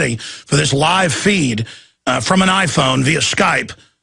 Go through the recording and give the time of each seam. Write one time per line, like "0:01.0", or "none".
0:02.2